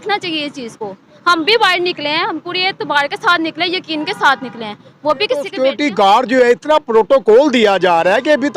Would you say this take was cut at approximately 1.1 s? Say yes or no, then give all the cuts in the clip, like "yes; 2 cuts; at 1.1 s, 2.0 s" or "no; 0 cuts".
no; 1 cut; at 5.5 s